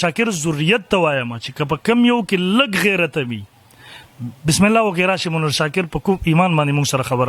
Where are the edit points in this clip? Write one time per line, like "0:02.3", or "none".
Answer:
none